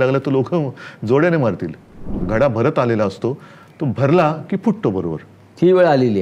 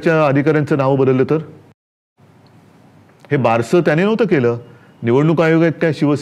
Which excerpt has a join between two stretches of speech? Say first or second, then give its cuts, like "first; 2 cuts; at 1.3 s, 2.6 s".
first; 1 cut; at 2.2 s